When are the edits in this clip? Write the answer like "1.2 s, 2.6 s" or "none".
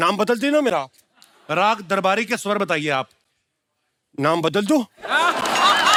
none